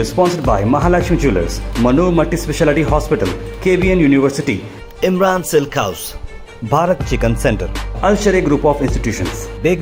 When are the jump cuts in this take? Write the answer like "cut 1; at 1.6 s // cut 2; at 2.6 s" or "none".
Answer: none